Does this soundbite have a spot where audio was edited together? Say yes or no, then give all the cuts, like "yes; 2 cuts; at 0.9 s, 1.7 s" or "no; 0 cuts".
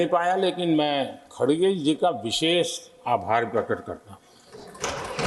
no; 0 cuts